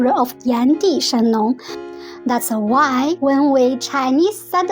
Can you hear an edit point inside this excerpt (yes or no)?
yes